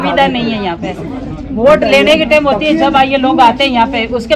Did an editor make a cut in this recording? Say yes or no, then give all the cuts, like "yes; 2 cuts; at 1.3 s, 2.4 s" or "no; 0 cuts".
no; 0 cuts